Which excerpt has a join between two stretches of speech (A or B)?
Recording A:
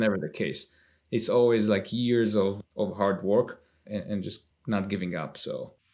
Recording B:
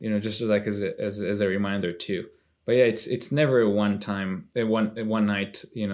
A